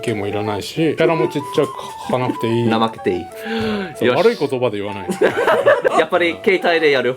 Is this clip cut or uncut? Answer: cut